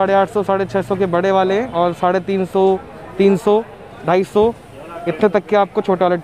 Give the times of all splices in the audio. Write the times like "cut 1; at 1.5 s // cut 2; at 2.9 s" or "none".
none

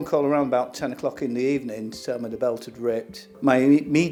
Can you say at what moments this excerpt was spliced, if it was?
none

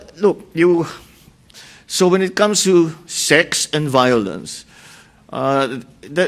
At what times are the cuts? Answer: cut 1; at 1.5 s

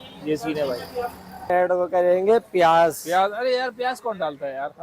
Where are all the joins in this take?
cut 1; at 1.5 s

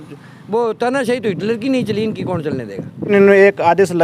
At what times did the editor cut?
cut 1; at 3.1 s

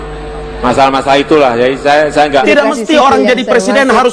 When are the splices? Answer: cut 1; at 2.4 s

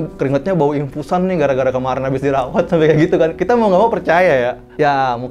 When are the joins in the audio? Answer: none

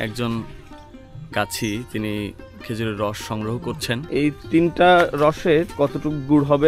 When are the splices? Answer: cut 1; at 3.9 s // cut 2; at 5.7 s

